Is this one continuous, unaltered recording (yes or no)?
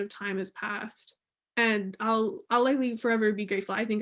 no